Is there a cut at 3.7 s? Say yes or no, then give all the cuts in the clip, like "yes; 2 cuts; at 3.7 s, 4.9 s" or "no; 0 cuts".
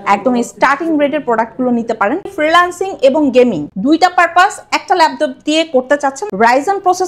yes; 3 cuts; at 2.3 s, 3.7 s, 6.3 s